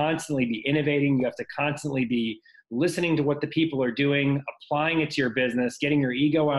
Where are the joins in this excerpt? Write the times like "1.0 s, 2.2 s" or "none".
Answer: none